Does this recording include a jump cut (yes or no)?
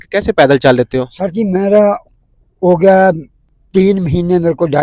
no